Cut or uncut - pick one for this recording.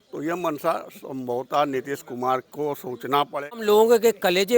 cut